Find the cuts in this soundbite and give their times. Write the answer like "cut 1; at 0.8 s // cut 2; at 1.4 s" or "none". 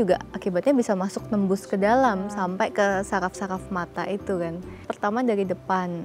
cut 1; at 4.9 s